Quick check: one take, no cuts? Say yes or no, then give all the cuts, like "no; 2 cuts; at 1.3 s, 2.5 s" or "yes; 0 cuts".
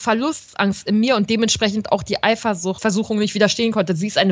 no; 1 cut; at 2.8 s